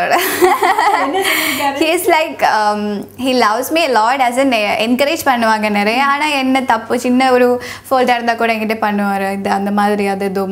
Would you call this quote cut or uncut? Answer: uncut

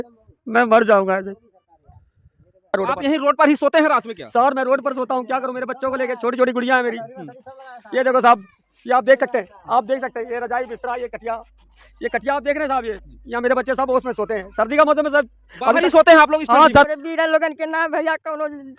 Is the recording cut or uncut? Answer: cut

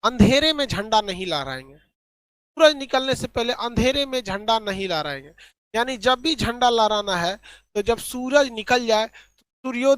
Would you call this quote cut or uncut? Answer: uncut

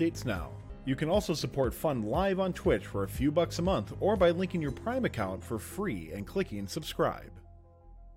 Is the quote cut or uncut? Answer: cut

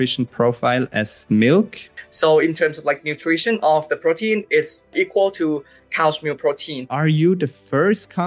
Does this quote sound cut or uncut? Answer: cut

